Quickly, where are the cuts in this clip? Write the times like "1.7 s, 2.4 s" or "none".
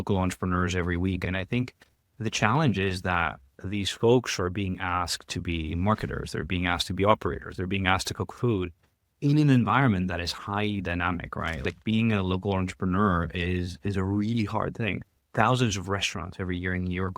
1.2 s, 11.7 s